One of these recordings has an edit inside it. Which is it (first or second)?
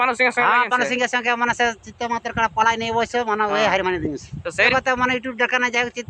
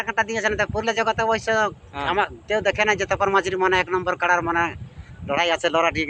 first